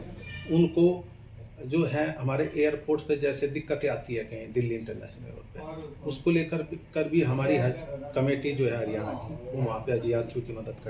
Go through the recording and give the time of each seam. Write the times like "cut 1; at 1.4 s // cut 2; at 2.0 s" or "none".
none